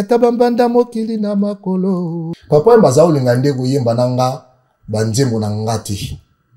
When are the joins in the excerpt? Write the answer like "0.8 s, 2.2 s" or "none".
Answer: 2.3 s